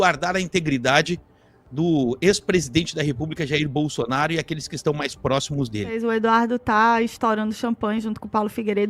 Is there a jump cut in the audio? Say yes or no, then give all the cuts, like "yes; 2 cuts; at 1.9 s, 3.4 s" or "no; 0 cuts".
yes; 1 cut; at 6.0 s